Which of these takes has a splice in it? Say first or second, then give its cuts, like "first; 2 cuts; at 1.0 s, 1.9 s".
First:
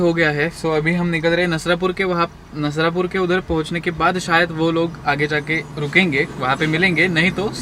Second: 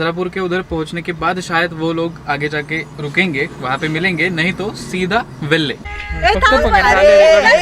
second; 1 cut; at 6.0 s